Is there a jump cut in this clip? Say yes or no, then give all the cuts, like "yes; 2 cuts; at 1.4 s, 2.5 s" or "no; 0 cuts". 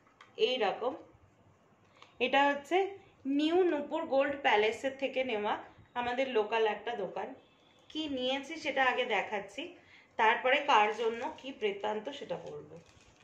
no; 0 cuts